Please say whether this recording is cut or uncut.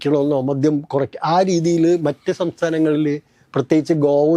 uncut